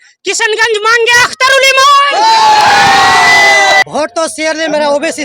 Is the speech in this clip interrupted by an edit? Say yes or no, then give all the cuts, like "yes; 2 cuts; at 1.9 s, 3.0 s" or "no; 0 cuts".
yes; 1 cut; at 3.8 s